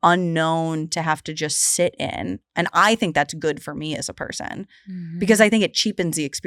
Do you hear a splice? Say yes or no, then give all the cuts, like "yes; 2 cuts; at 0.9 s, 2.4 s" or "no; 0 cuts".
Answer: no; 0 cuts